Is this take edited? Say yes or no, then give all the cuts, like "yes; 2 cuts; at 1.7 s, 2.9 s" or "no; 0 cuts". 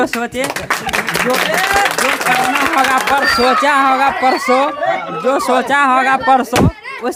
no; 0 cuts